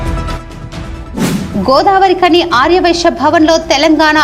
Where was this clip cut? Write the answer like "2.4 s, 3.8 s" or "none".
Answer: 1.5 s